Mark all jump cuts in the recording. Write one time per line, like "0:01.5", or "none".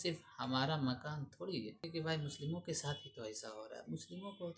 0:01.9